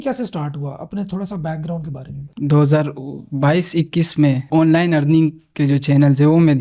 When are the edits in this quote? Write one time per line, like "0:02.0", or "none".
none

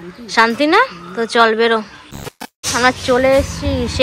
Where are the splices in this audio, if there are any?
none

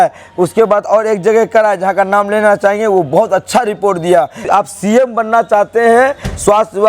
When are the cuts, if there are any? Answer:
0:04.4

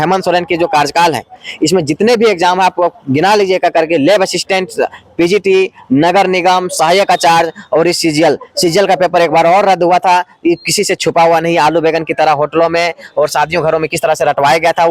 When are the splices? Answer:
none

